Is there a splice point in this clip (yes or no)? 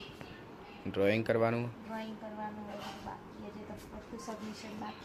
no